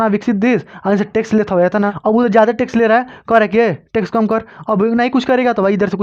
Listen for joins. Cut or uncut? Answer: cut